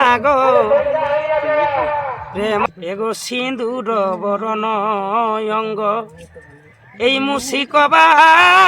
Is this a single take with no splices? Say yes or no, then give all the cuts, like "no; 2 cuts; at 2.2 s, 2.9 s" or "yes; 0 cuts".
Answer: no; 1 cut; at 2.7 s